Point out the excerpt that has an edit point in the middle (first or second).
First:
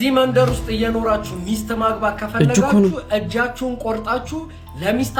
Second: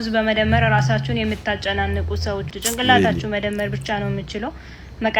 second